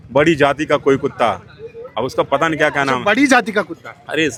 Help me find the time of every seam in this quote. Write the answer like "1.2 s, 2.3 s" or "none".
none